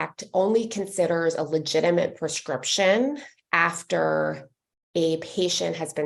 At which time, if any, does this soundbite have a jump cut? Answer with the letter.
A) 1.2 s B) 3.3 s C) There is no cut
C